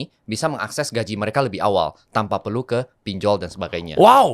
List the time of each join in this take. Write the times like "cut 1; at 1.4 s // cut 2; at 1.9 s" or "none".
none